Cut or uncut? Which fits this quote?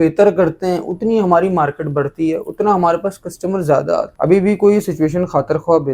cut